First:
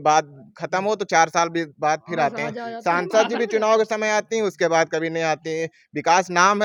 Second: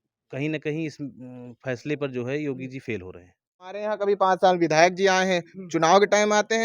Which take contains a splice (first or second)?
second